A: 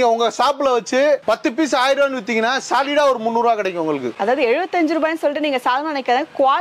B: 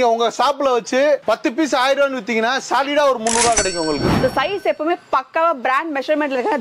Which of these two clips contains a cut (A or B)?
B